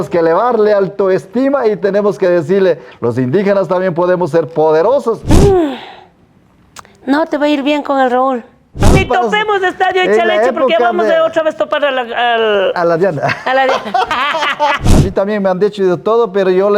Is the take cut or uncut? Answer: cut